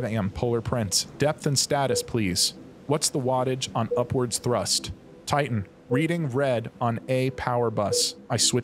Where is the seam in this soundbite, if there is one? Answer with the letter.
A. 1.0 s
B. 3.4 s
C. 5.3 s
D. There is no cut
C